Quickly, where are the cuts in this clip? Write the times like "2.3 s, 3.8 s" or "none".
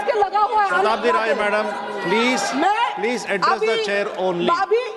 none